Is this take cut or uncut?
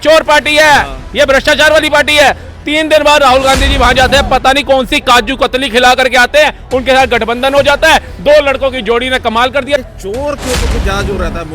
cut